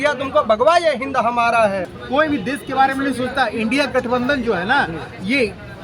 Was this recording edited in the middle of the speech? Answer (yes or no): yes